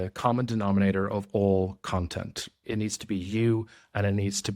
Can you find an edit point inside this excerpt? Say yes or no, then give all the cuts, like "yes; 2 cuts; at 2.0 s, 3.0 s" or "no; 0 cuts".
yes; 1 cut; at 2.5 s